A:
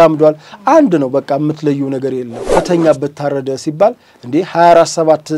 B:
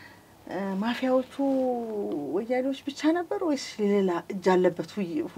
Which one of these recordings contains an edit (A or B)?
A